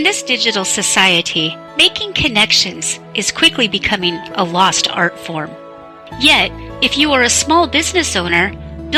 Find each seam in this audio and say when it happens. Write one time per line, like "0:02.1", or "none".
none

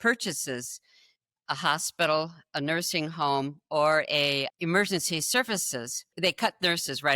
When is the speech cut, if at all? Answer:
0:04.5
0:06.1

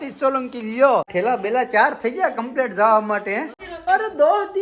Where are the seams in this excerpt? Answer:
0:01.1
0:03.6

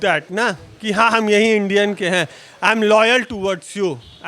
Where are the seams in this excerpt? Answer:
none

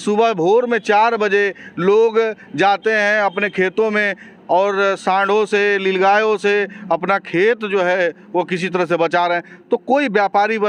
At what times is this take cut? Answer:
none

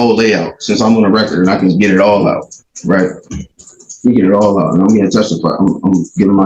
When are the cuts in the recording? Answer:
none

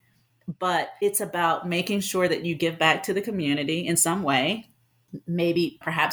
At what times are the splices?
none

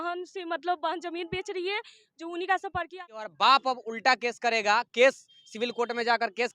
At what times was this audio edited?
0:02.9

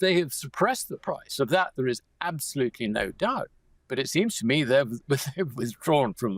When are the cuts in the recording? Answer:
none

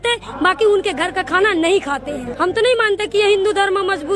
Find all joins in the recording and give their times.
0:02.2

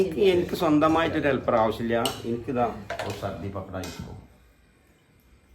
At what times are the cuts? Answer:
0:03.1

